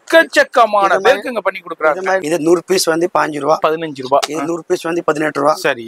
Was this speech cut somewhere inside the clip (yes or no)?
yes